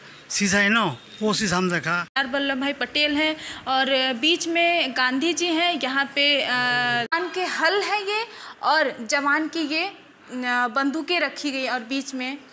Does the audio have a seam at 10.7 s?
no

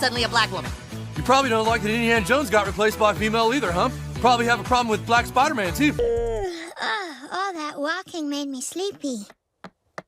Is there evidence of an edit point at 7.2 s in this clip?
no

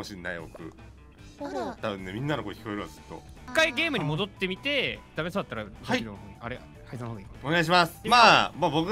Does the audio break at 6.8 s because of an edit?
no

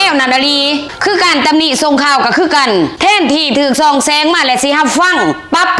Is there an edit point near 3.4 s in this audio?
no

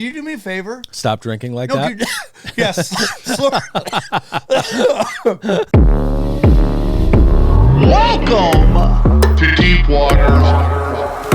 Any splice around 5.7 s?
yes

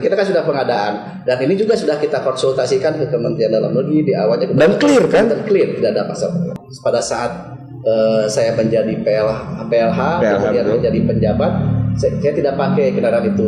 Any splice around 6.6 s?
yes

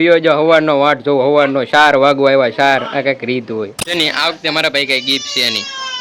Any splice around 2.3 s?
no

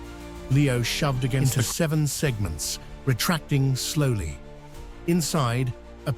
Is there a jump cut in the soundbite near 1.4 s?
yes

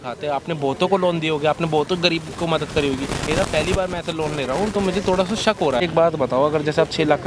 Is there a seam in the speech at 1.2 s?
no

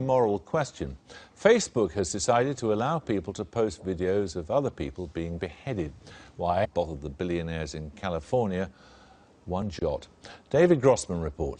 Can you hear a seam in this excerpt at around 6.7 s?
no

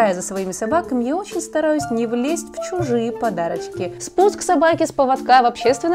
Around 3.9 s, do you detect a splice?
yes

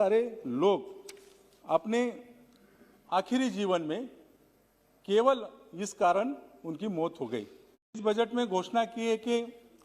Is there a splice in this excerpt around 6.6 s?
no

